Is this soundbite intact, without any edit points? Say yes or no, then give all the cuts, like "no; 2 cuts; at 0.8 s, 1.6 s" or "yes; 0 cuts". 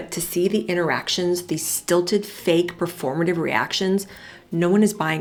yes; 0 cuts